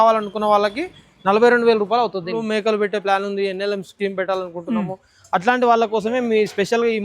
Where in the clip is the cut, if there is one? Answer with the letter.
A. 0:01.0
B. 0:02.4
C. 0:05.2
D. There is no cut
B